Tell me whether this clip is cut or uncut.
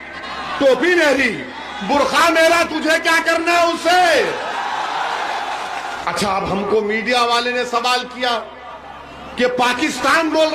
cut